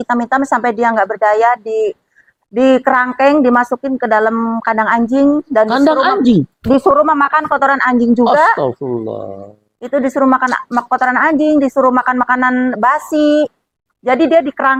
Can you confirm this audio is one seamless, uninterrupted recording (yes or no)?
yes